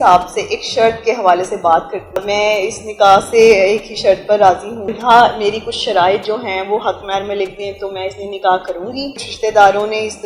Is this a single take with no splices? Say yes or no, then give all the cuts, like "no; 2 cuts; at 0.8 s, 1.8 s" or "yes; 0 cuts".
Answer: no; 3 cuts; at 2.2 s, 4.9 s, 9.2 s